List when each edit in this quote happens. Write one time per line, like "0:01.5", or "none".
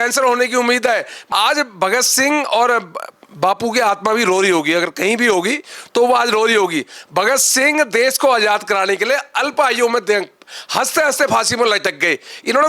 0:01.1